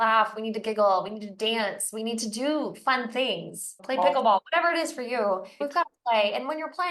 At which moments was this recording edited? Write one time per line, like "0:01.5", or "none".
0:03.8
0:05.6